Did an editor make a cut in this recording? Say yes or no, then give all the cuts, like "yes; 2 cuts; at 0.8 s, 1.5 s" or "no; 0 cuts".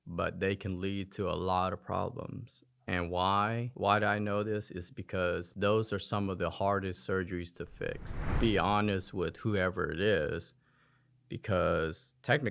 yes; 1 cut; at 8.3 s